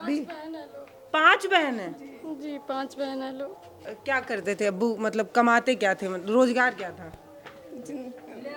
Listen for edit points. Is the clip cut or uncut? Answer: cut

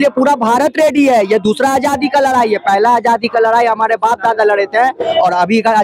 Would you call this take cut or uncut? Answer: uncut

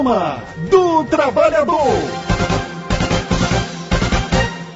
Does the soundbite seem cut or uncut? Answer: cut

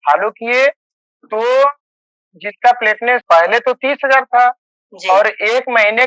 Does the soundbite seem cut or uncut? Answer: cut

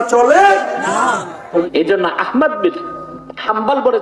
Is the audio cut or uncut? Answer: cut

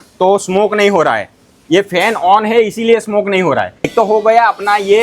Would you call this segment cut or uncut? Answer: cut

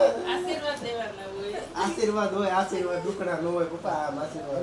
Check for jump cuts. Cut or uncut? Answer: uncut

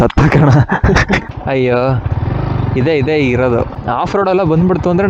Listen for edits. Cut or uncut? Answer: cut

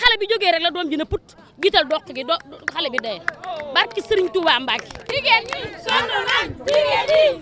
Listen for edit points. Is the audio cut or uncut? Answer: cut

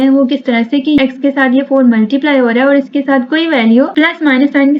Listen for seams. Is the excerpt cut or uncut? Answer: cut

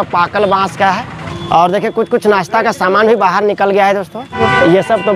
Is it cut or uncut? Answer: cut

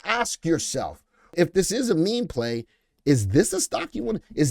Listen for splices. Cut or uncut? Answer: cut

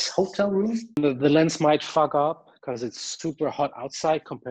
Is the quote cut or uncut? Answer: cut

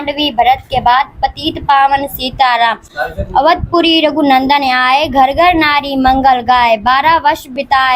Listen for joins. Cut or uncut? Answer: uncut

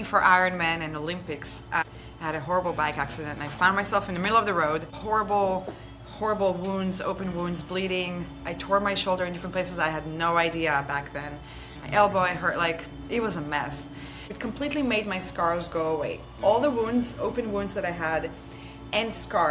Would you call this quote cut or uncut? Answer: cut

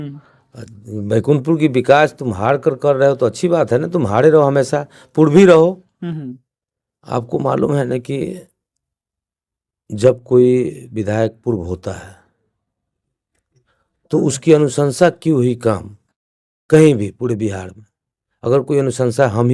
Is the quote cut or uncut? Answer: uncut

